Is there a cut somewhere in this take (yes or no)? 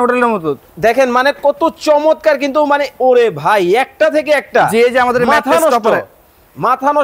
no